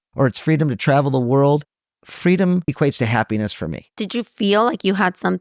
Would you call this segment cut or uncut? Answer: cut